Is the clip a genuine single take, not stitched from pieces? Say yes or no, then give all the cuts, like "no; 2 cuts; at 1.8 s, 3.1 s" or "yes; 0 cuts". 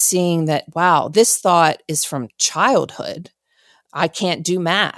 no; 1 cut; at 1.1 s